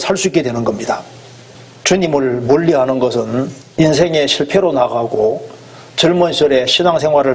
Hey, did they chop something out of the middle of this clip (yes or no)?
yes